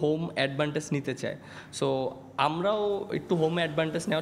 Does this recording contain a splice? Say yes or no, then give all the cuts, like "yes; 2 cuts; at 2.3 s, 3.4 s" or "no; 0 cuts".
no; 0 cuts